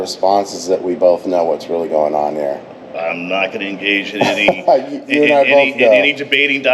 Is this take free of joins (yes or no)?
yes